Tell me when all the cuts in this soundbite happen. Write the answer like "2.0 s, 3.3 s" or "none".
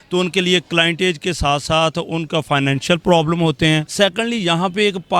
3.9 s

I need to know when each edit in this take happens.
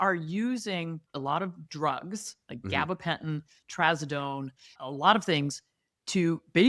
1.1 s

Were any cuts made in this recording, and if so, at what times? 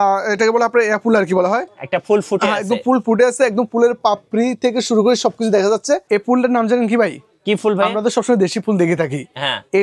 6.0 s

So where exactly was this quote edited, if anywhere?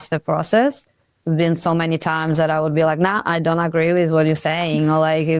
none

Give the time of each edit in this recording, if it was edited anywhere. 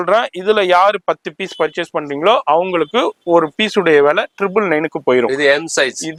none

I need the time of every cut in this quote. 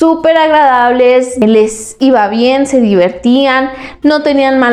1.4 s

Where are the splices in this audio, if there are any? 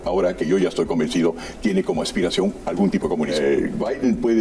3.3 s

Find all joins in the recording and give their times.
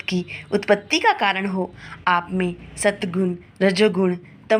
none

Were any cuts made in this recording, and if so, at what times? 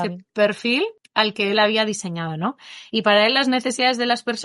1.0 s

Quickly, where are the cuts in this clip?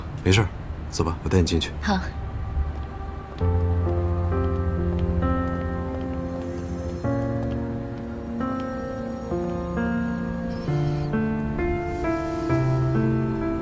none

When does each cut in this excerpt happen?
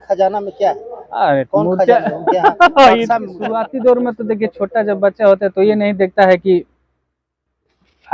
3.4 s

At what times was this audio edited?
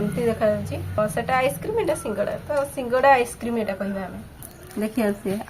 1.0 s, 4.4 s

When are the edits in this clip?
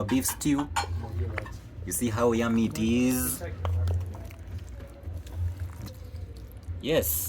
5.7 s

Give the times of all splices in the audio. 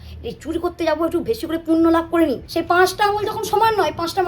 2.4 s

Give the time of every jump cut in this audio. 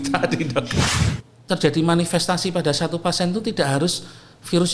1.0 s

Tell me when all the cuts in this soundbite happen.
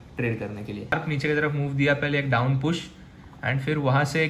0.9 s

